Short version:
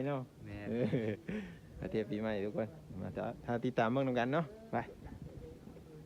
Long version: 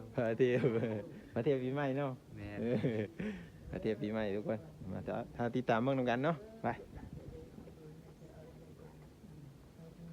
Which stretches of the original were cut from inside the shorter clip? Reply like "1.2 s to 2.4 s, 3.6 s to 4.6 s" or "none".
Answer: none